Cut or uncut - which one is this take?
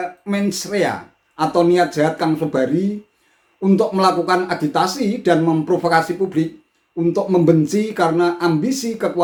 uncut